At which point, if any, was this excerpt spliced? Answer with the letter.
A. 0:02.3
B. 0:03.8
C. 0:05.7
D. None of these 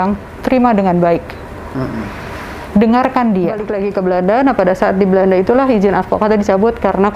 B